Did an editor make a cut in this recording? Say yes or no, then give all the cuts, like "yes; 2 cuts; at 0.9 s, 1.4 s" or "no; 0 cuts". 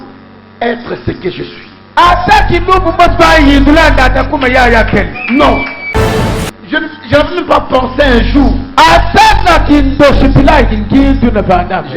yes; 1 cut; at 6.1 s